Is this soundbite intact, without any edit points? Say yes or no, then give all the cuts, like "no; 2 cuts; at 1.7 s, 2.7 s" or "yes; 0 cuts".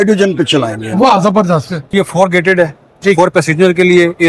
no; 1 cut; at 1.9 s